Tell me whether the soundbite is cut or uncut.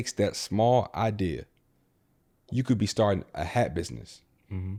uncut